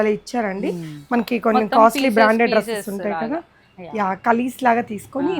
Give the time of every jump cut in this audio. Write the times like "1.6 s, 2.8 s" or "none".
none